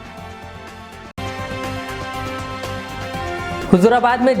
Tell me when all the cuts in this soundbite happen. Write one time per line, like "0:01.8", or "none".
0:01.2
0:03.4